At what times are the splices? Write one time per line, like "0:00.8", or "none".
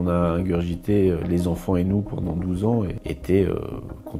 0:03.0